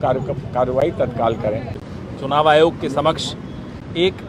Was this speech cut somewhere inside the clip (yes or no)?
no